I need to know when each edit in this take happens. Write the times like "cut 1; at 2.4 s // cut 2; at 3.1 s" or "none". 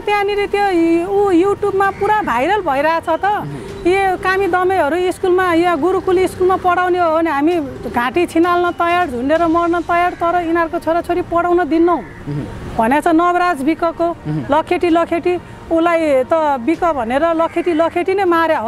none

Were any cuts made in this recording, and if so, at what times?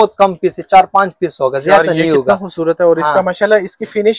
none

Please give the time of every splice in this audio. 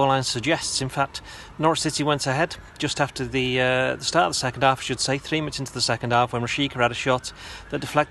none

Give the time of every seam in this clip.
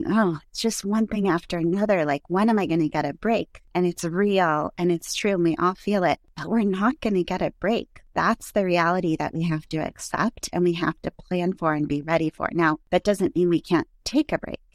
cut 1; at 3.6 s // cut 2; at 6.3 s // cut 3; at 8.0 s // cut 4; at 12.8 s

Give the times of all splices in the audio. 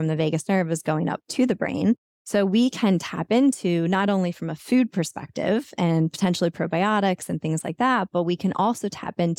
cut 1; at 2.1 s

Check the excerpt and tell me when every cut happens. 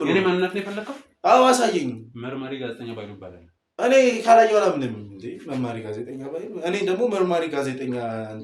none

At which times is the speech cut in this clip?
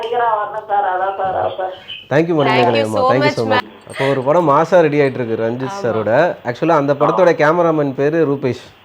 cut 1; at 3.6 s

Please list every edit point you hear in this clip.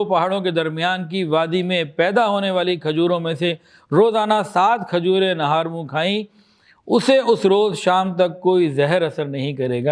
none

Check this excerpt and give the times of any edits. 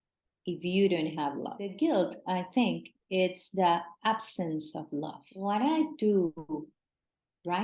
cut 1; at 1.6 s // cut 2; at 5.3 s

